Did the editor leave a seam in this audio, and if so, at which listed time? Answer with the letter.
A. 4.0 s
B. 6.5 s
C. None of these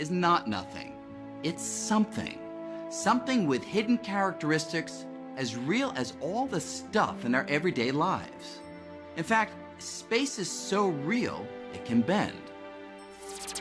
B